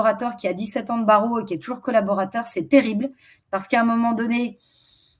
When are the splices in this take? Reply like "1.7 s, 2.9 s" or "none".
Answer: none